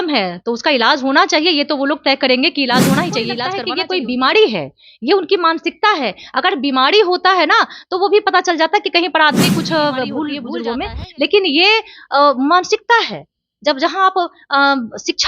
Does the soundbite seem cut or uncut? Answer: cut